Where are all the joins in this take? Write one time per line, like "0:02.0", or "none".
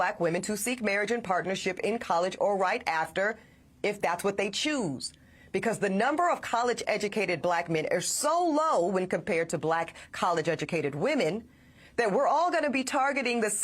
0:07.8

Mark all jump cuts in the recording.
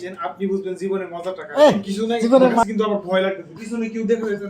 0:02.6

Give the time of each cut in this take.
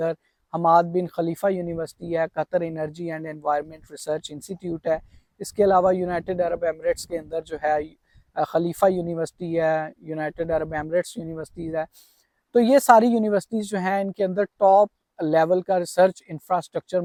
none

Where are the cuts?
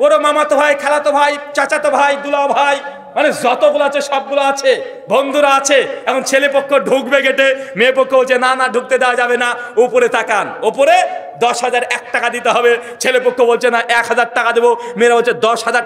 none

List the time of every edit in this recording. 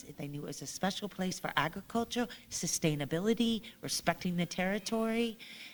none

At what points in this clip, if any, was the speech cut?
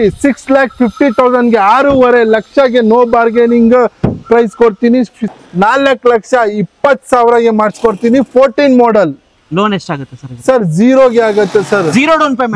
0:05.2

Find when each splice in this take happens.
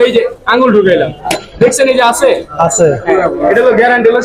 none

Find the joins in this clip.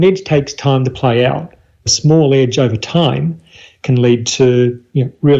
0:01.9

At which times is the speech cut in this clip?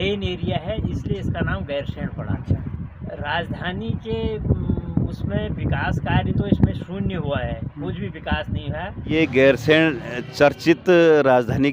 0:02.7
0:09.1

